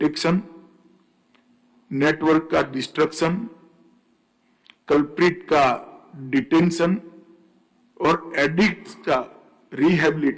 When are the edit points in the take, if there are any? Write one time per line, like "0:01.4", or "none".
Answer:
none